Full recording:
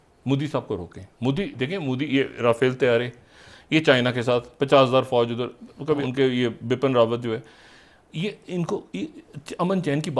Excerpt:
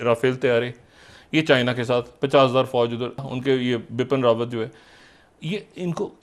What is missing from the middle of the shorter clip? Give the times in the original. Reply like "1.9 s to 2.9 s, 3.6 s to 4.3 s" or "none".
5.7 s to 6.1 s